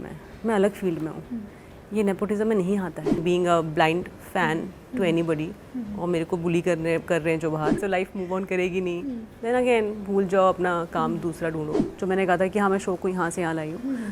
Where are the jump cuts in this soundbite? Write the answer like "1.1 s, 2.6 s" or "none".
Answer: 3.2 s, 7.8 s, 11.8 s